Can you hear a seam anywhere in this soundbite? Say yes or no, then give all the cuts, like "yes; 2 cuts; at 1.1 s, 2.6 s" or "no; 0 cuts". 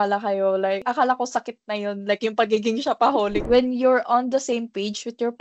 yes; 2 cuts; at 0.8 s, 3.4 s